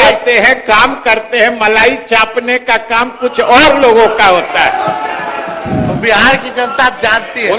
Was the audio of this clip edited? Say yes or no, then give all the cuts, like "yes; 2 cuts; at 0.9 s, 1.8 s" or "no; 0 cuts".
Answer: no; 0 cuts